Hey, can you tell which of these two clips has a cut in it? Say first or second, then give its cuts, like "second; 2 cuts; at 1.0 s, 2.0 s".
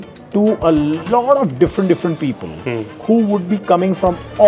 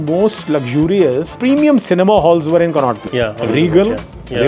second; 2 cuts; at 1.3 s, 3.4 s